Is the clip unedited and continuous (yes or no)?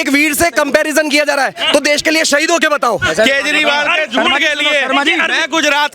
no